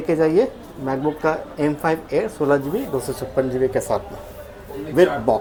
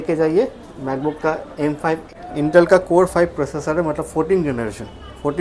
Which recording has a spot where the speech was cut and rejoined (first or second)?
second